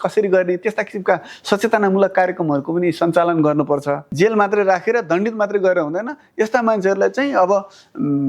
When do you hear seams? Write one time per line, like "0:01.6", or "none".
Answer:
0:04.0